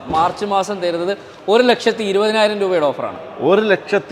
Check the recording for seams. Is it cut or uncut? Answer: uncut